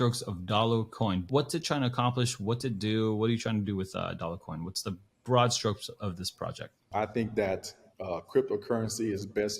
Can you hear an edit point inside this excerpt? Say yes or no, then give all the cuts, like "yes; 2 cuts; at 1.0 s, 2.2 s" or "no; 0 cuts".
yes; 2 cuts; at 1.2 s, 6.8 s